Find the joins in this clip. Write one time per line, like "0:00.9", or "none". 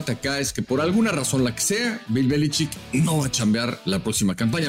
0:02.8
0:03.8